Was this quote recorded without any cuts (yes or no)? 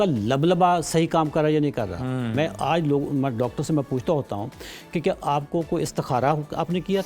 yes